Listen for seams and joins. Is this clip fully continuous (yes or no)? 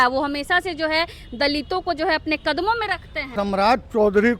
no